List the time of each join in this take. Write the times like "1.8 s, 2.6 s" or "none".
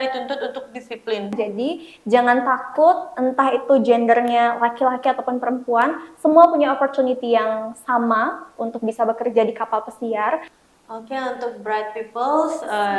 1.4 s, 10.5 s